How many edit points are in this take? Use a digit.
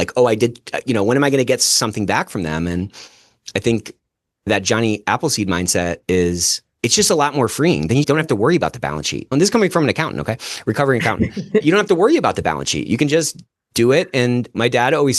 2